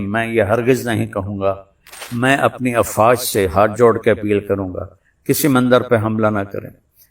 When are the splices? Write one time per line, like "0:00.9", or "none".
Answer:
0:02.0